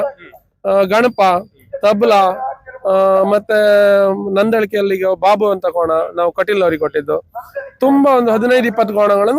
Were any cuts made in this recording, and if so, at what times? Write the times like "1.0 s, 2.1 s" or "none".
none